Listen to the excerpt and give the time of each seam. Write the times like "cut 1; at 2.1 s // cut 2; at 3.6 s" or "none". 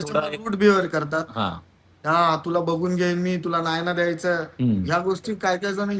none